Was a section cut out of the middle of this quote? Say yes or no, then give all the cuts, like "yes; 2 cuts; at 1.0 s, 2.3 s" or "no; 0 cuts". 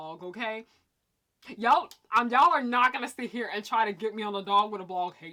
no; 0 cuts